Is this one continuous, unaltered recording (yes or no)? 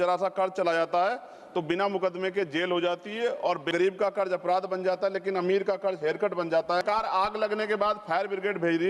no